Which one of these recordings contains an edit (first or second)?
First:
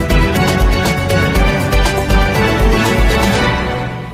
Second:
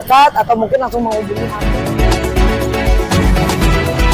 second